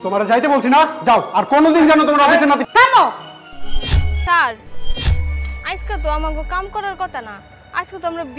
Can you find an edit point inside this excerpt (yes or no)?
yes